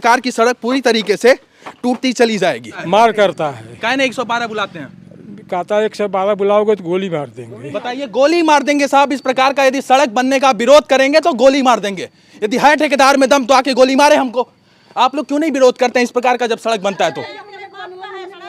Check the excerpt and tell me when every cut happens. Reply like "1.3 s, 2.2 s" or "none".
2.7 s